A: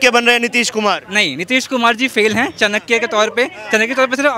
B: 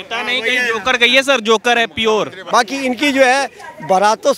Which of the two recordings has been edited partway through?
B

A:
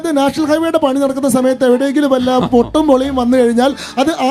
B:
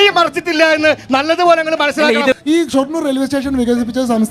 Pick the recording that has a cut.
B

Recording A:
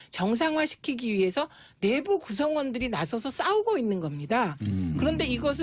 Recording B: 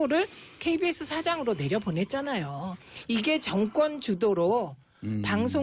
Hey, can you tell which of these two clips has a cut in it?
B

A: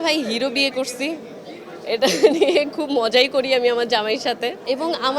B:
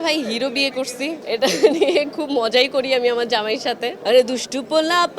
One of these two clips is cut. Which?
B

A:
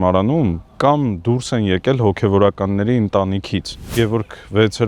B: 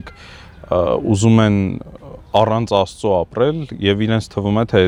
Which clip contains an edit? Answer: A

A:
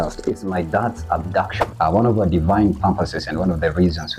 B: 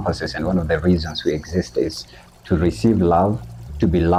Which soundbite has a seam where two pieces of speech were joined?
A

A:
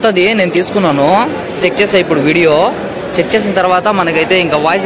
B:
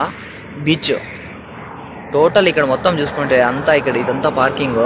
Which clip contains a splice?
A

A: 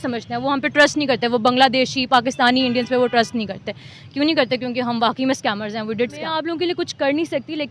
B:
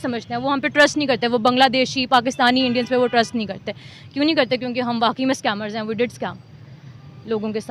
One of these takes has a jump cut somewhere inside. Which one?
A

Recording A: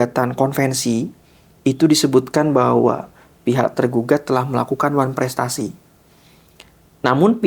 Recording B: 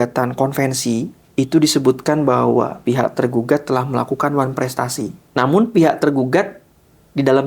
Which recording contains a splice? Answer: B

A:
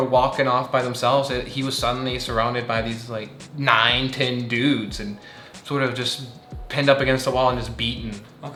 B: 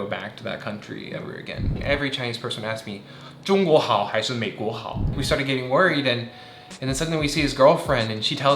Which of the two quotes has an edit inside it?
B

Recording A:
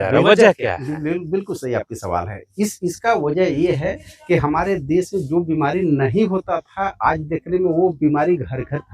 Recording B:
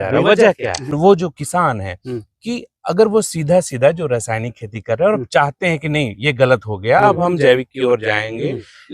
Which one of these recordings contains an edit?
B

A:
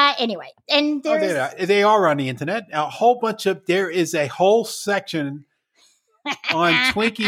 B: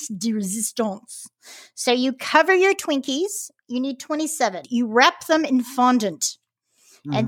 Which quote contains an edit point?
B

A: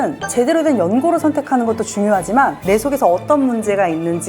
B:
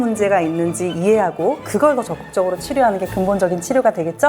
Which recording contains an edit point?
A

